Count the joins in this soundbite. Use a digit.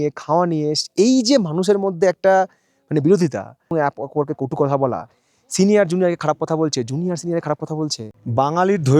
1